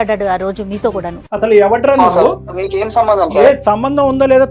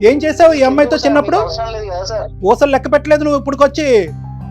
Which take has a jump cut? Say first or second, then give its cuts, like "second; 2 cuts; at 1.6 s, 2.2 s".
second; 1 cut; at 2.3 s